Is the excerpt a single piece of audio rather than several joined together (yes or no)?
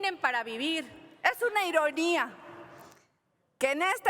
no